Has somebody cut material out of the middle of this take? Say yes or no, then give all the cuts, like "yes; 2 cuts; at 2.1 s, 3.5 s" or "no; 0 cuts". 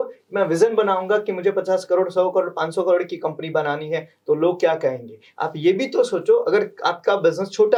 no; 0 cuts